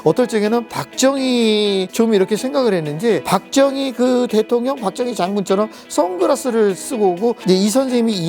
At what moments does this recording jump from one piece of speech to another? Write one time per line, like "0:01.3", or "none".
0:01.9
0:03.2
0:07.4

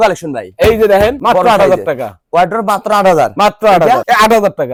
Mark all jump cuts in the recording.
none

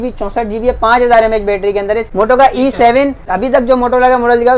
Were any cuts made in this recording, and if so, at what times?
0:02.1
0:03.2

